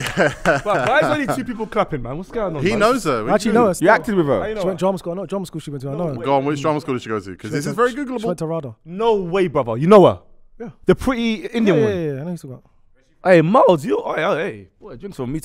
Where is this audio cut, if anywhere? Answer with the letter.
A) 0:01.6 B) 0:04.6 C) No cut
B